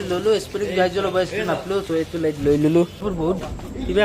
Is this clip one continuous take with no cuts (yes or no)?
no